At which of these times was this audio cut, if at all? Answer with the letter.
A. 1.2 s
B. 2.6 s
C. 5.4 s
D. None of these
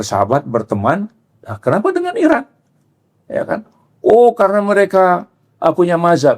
D